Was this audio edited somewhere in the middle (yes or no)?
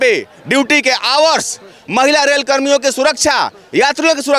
no